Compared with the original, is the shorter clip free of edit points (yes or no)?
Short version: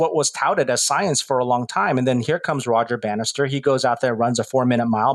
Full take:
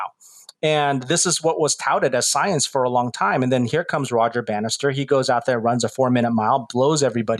yes